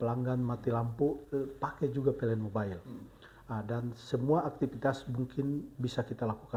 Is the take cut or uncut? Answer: uncut